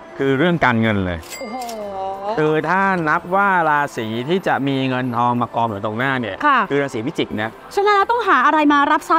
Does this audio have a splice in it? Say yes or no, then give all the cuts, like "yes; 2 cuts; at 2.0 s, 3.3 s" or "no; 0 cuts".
no; 0 cuts